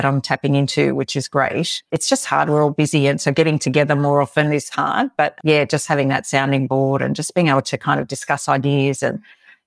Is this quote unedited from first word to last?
yes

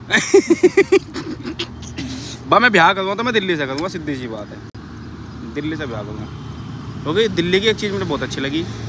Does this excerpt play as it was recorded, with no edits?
yes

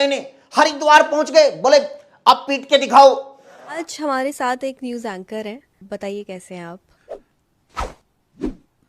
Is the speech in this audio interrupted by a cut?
yes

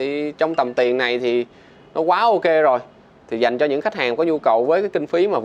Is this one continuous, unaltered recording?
yes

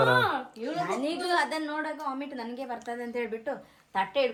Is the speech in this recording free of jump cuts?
yes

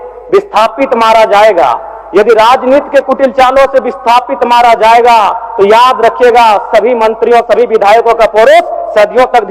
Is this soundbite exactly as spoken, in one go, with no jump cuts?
yes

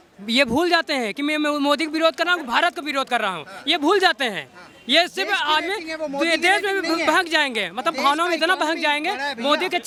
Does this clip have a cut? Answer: no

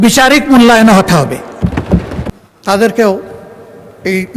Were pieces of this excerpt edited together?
yes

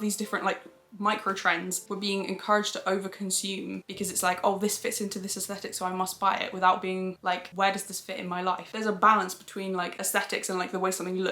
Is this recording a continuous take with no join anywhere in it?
no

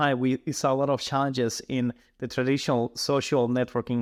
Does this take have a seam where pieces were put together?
no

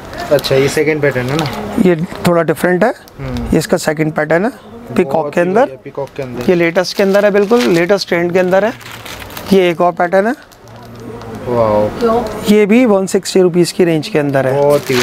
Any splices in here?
no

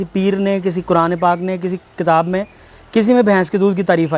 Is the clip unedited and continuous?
yes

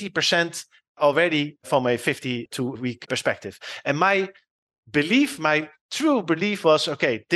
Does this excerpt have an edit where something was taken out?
no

